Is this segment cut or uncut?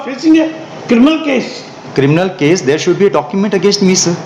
uncut